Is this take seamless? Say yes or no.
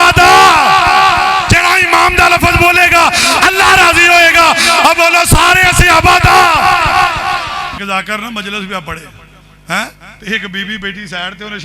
no